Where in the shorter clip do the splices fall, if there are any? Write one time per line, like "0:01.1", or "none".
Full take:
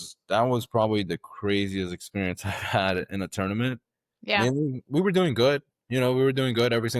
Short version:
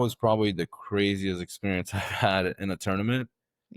none